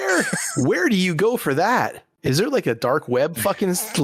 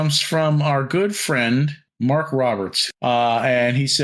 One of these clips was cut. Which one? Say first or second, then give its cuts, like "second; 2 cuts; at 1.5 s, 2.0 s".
second; 2 cuts; at 1.8 s, 2.8 s